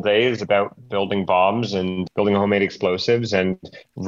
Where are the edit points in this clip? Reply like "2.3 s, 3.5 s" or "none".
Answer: 2.0 s